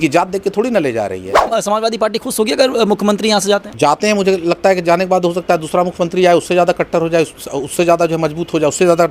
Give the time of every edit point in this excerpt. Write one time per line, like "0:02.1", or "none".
0:01.5
0:03.7